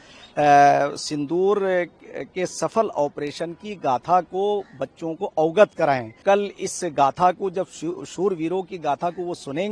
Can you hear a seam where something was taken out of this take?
yes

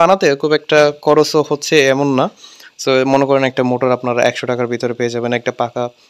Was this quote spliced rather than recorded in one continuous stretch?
no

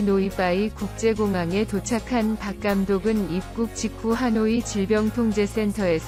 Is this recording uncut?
yes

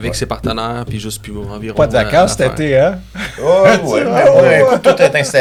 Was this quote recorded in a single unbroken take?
yes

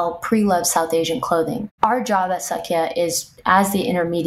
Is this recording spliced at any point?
yes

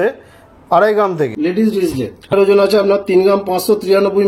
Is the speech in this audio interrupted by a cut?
yes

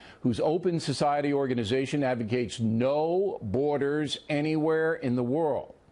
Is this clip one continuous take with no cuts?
no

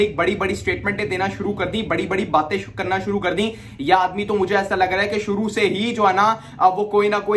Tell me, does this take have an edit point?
no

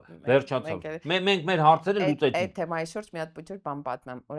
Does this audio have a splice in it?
no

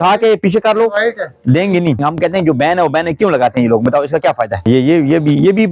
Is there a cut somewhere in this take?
yes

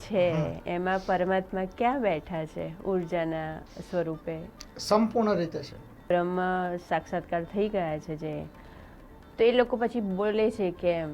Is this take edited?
yes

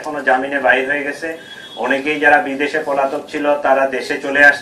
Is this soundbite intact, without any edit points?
yes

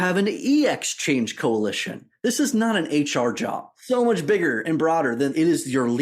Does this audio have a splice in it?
yes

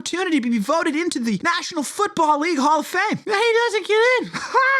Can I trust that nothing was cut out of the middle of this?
no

